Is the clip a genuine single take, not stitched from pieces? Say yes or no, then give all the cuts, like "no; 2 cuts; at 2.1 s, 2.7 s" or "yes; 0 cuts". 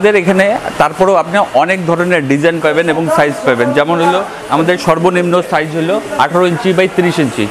yes; 0 cuts